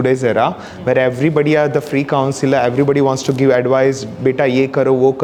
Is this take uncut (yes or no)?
yes